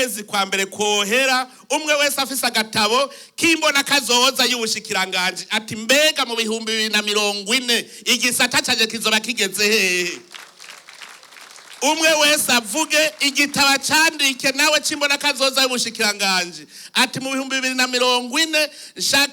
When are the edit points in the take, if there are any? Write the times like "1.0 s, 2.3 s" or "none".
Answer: none